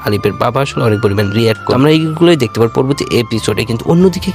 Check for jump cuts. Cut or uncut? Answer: cut